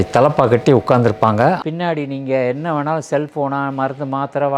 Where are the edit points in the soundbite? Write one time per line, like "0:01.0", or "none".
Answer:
0:01.6

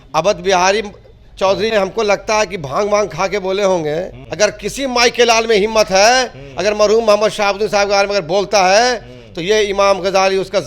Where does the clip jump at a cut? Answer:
0:01.7
0:04.2

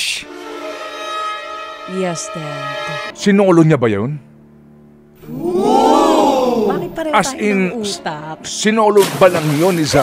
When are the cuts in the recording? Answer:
0:03.1

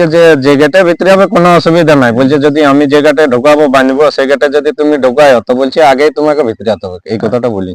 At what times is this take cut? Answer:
none

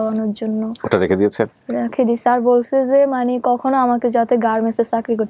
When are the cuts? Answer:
none

